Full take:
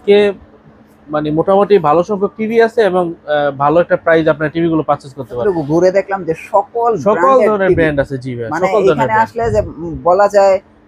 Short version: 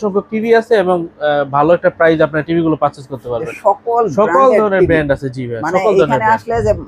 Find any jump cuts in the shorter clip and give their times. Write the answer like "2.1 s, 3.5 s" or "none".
3.3 s